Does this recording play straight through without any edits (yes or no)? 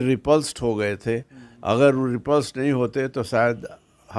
yes